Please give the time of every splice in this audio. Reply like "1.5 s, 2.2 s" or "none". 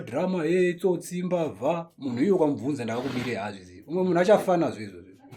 none